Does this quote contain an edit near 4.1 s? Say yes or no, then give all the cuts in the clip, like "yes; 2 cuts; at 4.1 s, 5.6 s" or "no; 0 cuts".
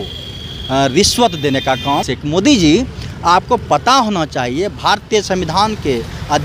no; 1 cut; at 2.1 s